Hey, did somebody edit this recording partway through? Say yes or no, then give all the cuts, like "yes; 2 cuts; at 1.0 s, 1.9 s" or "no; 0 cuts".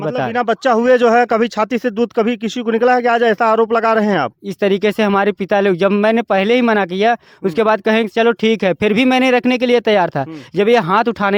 no; 0 cuts